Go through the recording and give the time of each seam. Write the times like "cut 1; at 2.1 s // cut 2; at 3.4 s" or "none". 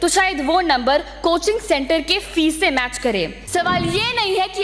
cut 1; at 3.4 s